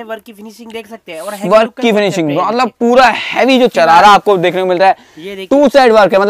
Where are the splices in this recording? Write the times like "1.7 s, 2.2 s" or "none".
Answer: 3.7 s